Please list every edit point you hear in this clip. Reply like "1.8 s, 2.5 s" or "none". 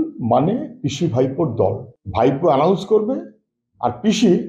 1.9 s